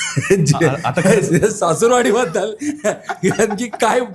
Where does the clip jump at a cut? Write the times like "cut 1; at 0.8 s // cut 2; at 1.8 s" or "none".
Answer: none

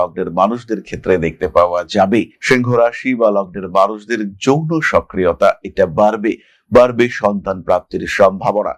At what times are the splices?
none

